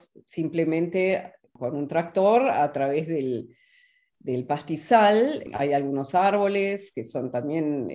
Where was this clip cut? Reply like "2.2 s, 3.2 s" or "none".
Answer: 1.5 s, 5.5 s